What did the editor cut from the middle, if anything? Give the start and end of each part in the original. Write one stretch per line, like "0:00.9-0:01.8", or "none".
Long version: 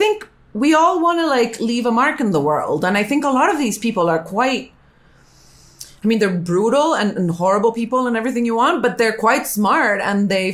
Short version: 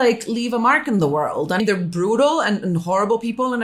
0:02.9-0:06.1